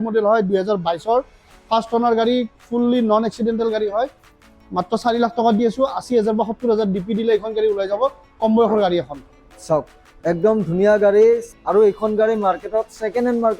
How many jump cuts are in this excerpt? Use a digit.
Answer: 1